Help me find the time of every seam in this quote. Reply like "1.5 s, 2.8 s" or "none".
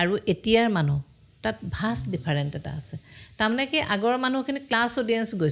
none